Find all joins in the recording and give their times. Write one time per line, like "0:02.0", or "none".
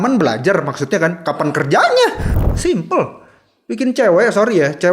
0:02.3

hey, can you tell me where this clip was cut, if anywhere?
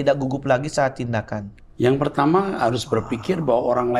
0:01.6

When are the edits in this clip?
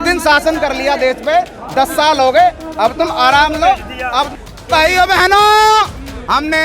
0:04.4

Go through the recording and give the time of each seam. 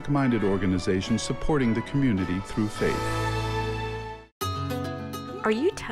0:03.0
0:04.3

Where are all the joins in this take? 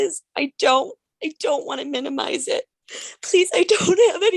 0:02.8

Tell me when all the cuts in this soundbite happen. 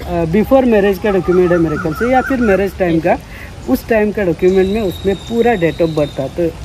none

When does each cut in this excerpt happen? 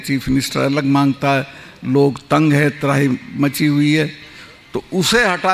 none

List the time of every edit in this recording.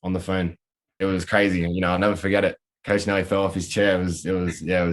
0:00.9

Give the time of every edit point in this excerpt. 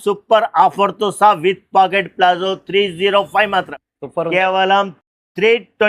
0:03.8

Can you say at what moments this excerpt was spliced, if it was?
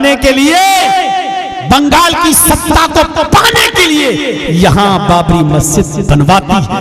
none

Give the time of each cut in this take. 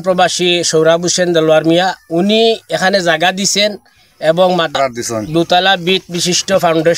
0:04.7

